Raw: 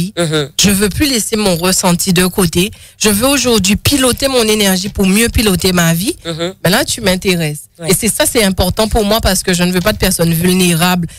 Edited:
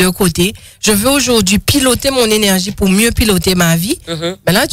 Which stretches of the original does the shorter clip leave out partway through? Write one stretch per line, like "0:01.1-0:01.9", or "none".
none